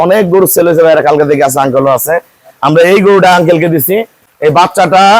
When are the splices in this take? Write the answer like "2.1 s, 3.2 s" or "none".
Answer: 4.2 s